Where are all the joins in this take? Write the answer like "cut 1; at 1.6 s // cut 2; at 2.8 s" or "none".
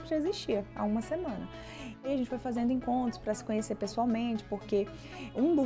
cut 1; at 2.0 s